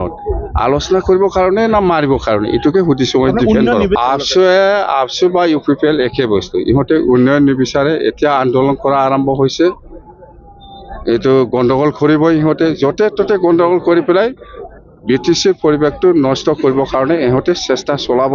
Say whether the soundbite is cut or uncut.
cut